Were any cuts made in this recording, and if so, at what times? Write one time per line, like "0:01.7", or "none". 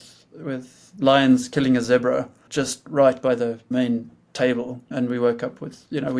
0:00.8
0:02.4
0:03.7
0:04.9